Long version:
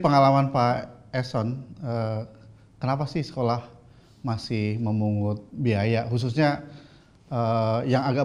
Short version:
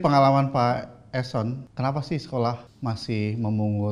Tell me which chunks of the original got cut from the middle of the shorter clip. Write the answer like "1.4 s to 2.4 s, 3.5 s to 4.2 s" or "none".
1.7 s to 2.7 s, 3.7 s to 4.1 s

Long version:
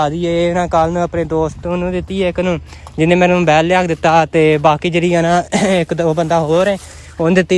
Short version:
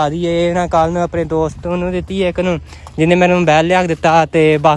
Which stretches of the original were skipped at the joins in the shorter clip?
none

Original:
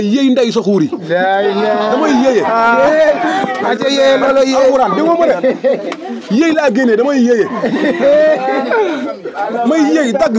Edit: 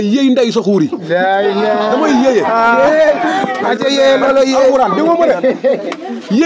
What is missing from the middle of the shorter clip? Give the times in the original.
none

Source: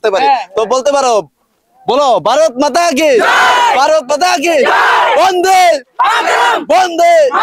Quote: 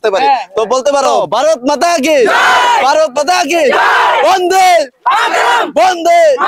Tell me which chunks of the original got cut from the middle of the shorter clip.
1.2 s to 2.1 s

